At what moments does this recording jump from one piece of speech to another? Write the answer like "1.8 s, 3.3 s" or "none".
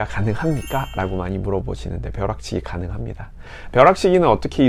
none